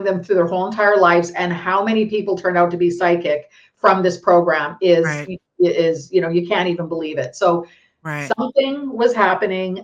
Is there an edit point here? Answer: no; 0 cuts

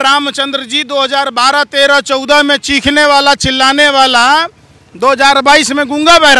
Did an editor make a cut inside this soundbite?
no; 0 cuts

